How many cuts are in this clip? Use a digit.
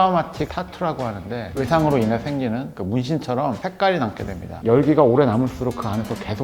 1